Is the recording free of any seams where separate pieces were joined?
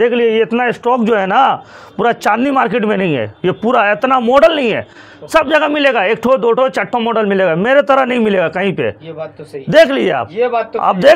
yes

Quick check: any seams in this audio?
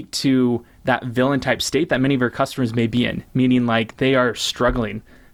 no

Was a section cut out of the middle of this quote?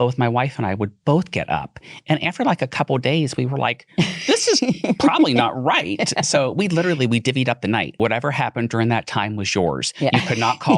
yes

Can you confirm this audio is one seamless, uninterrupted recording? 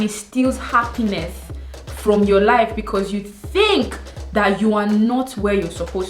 yes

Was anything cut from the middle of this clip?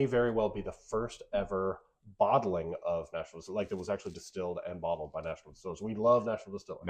no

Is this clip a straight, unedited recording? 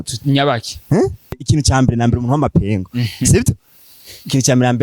no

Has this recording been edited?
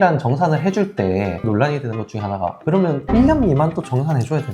yes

